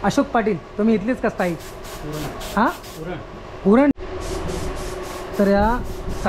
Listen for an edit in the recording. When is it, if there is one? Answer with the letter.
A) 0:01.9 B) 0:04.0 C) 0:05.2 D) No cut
B